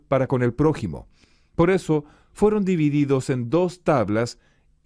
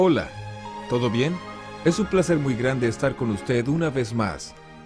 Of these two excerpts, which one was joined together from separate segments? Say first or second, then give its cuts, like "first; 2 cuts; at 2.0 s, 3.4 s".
first; 1 cut; at 2.6 s